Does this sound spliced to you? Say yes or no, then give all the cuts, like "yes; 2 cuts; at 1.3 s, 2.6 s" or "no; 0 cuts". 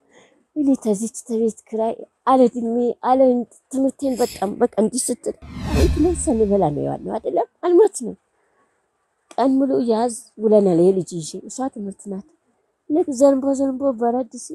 yes; 1 cut; at 5.6 s